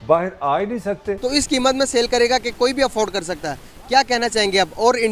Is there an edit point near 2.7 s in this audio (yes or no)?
no